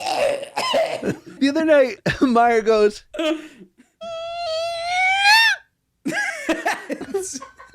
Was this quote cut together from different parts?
yes; 1 cut; at 1.3 s

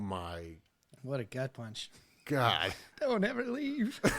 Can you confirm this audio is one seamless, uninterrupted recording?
no; 1 cut; at 2.8 s

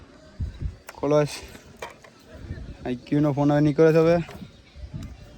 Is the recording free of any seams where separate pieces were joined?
yes; 0 cuts

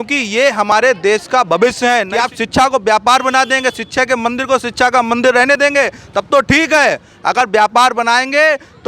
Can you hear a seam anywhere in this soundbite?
yes; 1 cut; at 2.1 s

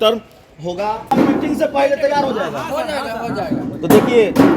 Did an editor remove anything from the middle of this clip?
yes; 1 cut; at 1.1 s

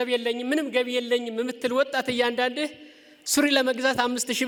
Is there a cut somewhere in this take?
no; 0 cuts

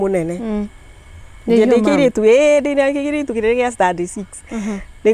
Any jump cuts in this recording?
no; 0 cuts

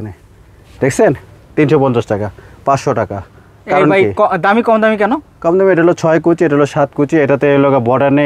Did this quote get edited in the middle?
no; 0 cuts

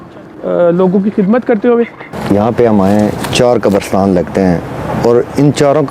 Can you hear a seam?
yes; 1 cut; at 2.1 s

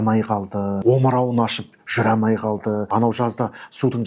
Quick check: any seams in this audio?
yes; 2 cuts; at 0.8 s, 2.9 s

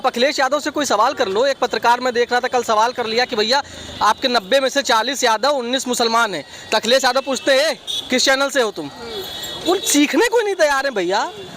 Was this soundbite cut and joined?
no; 0 cuts

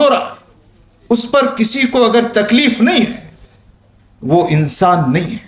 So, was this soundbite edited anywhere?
no; 0 cuts

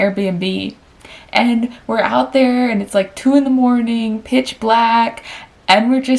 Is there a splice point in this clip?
no; 0 cuts

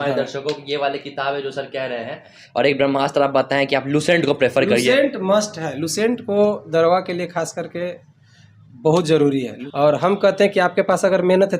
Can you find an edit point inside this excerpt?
yes; 2 cuts; at 2.4 s, 9.6 s

